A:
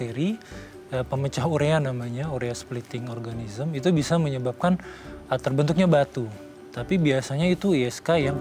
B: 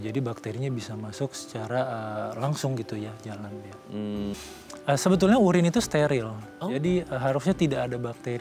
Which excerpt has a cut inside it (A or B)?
B